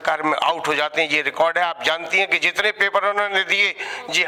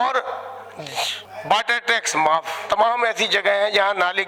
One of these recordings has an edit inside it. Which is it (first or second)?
second